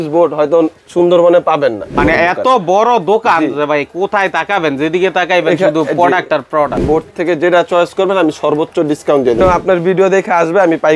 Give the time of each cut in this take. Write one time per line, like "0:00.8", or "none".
0:01.9
0:06.8
0:09.4